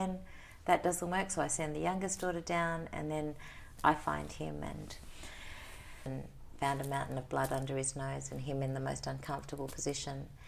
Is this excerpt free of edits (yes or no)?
no